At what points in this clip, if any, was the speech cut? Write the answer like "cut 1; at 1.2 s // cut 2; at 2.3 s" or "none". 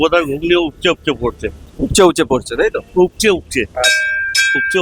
none